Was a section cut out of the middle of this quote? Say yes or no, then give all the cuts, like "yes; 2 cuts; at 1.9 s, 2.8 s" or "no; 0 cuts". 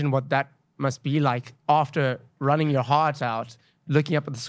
yes; 1 cut; at 1.5 s